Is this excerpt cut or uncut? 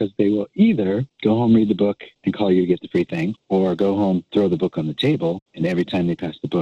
cut